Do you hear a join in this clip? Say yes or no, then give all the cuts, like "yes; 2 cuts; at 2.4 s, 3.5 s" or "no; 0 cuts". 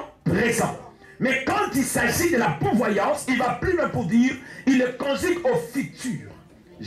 no; 0 cuts